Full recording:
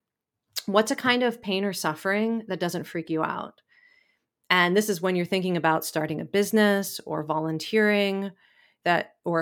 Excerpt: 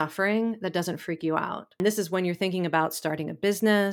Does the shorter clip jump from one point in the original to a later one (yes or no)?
yes